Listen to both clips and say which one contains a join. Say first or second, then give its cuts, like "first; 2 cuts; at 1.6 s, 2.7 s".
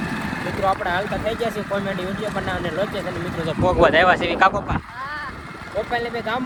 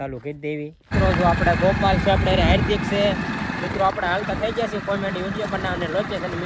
second; 1 cut; at 0.9 s